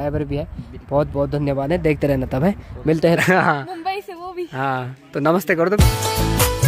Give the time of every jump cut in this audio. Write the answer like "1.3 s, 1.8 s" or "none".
3.2 s, 5.8 s